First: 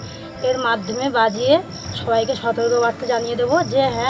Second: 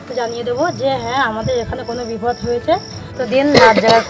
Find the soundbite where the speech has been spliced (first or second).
second